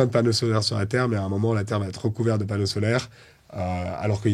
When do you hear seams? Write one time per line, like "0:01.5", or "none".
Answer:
none